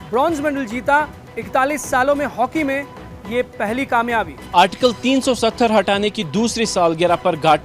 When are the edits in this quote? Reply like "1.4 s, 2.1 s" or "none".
4.4 s